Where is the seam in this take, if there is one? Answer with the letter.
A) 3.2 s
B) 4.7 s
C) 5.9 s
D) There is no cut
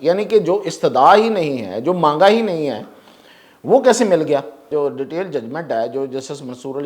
B